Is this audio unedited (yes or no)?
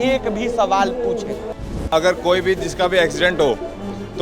no